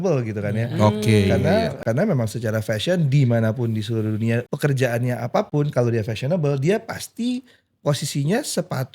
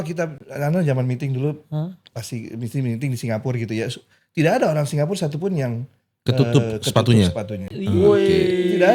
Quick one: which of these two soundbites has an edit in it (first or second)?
first